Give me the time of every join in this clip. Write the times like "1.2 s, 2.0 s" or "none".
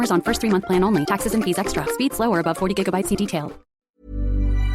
3.7 s